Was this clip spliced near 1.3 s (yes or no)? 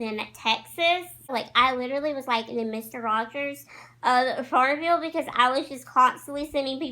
yes